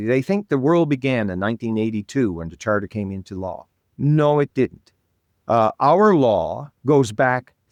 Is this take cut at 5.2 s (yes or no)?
no